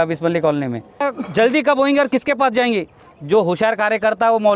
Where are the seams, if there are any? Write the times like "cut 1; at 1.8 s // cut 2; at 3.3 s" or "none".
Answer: cut 1; at 1.1 s